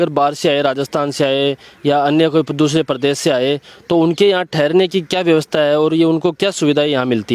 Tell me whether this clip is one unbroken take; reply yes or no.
yes